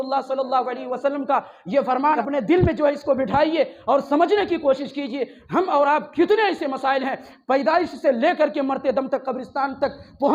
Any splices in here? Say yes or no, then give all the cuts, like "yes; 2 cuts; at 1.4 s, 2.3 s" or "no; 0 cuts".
yes; 1 cut; at 2.2 s